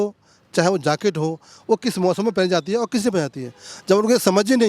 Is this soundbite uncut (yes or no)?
yes